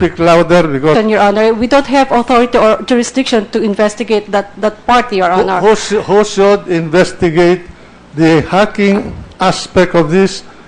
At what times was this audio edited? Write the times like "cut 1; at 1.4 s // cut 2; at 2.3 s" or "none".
none

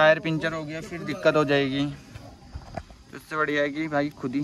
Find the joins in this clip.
none

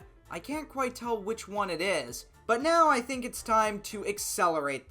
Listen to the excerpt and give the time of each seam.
cut 1; at 2.2 s

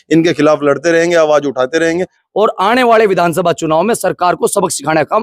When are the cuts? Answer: cut 1; at 2.5 s

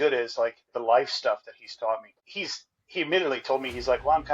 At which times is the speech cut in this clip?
cut 1; at 2.2 s

